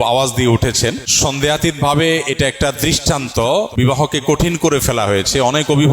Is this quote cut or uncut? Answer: cut